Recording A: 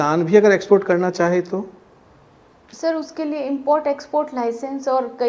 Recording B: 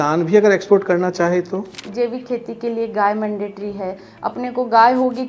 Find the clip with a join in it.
B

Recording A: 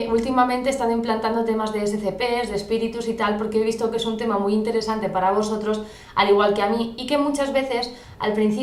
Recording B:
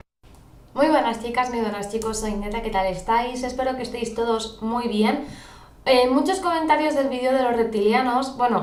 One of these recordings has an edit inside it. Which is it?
A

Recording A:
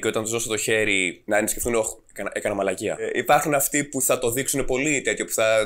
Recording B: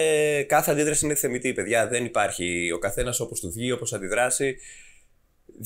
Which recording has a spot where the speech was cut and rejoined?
A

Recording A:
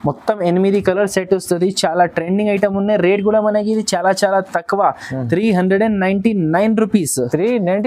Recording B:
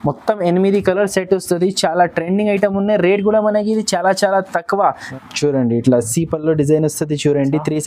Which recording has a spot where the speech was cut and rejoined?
B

